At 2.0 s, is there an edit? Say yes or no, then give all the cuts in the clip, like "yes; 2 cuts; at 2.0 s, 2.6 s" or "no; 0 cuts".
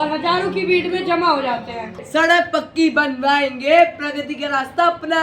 yes; 1 cut; at 2.0 s